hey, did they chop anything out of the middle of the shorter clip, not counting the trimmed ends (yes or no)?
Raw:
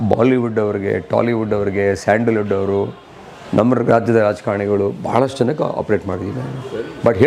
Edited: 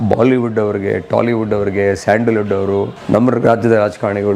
yes